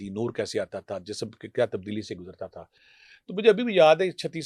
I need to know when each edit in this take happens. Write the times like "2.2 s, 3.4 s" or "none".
none